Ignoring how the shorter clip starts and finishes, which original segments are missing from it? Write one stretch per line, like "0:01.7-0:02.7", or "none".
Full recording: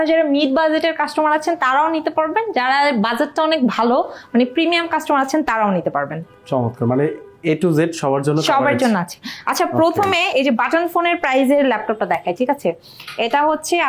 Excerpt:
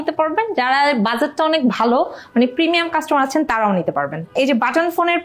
0:06.3-0:10.3